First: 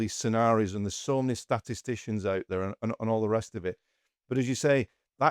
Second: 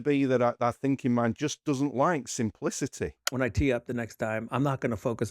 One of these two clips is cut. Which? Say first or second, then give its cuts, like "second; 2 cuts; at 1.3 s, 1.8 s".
second; 1 cut; at 3.2 s